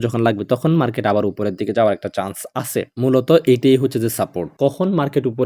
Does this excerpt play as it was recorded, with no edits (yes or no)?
no